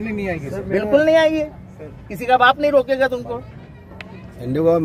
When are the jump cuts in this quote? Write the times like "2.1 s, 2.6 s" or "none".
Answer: none

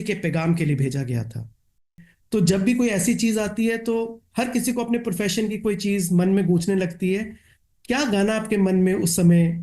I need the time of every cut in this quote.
2.1 s

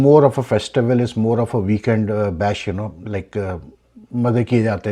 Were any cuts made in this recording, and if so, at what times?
none

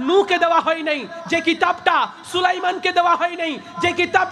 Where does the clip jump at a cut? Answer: none

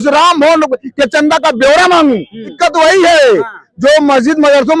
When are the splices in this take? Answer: 2.5 s

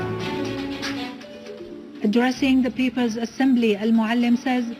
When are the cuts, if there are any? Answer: 3.8 s

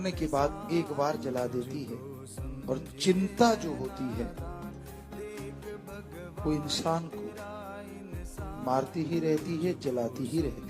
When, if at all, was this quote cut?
4.4 s, 6.4 s, 7.1 s, 8.6 s

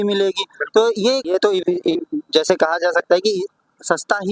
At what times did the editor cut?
1.2 s

